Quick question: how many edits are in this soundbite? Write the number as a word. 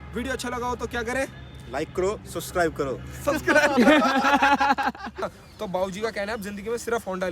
one